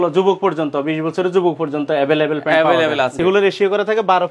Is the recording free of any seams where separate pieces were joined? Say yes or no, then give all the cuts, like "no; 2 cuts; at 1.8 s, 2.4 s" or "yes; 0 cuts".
no; 1 cut; at 3.2 s